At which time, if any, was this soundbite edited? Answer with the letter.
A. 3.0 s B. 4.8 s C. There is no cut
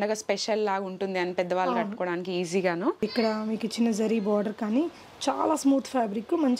A